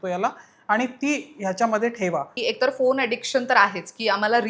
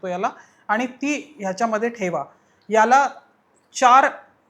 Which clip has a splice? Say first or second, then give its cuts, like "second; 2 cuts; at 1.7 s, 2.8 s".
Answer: first; 1 cut; at 2.4 s